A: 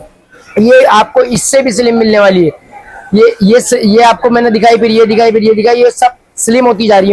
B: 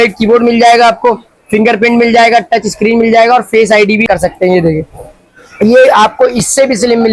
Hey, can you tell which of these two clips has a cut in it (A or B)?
B